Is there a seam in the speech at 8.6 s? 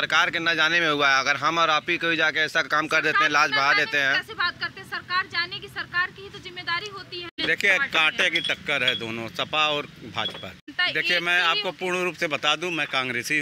no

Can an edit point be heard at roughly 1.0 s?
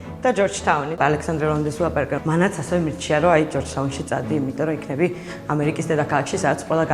yes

